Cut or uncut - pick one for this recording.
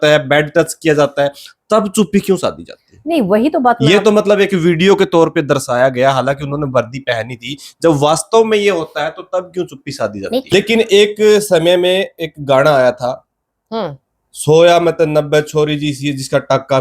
cut